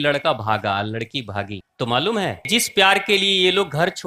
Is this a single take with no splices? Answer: no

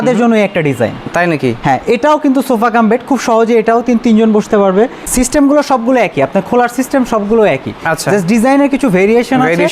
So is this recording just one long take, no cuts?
no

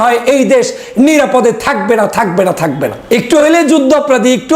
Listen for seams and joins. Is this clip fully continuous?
no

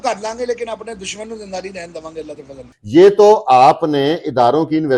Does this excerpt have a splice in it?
yes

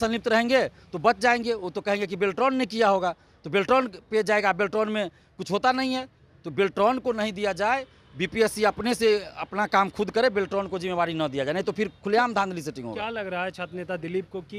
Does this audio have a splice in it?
no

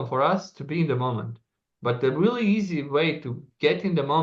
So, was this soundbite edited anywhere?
no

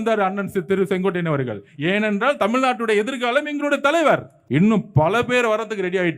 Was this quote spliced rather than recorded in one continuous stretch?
yes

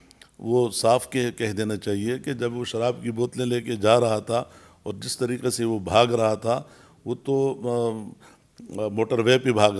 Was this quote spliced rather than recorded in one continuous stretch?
no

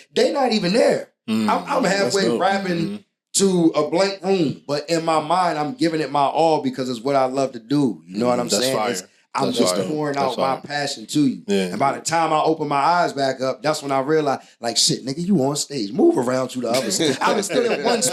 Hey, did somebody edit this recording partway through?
no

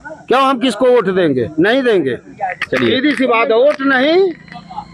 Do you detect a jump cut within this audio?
no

